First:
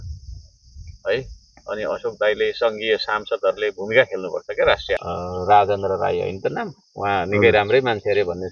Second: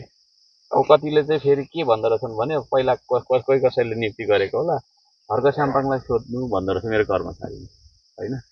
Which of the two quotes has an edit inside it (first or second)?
first